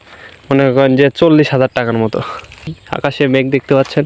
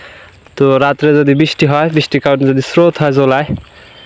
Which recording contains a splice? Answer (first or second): first